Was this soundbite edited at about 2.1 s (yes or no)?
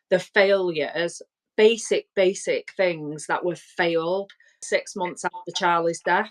no